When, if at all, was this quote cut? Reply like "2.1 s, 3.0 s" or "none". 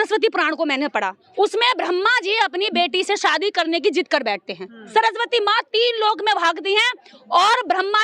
1.2 s, 4.7 s

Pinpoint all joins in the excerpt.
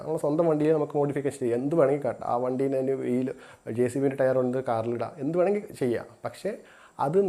none

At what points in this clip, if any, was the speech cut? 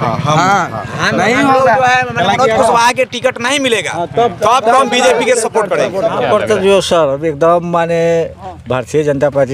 6.2 s

